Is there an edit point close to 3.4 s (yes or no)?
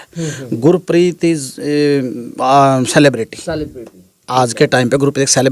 no